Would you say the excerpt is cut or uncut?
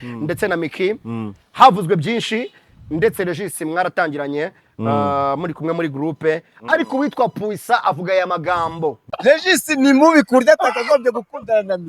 cut